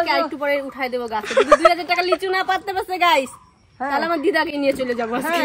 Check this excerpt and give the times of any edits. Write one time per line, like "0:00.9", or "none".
none